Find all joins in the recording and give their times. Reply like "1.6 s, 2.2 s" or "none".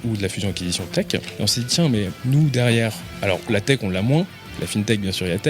1.2 s, 2.2 s, 3.1 s, 4.6 s